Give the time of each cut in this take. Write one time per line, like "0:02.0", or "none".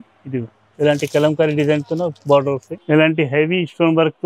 0:02.7